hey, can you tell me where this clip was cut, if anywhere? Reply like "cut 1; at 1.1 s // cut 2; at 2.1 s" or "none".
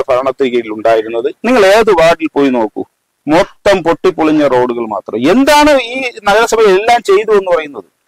cut 1; at 1.3 s